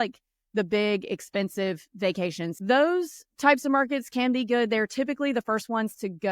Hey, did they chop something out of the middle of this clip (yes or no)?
yes